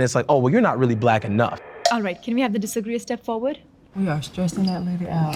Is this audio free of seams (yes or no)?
yes